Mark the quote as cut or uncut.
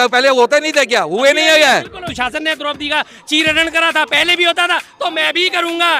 cut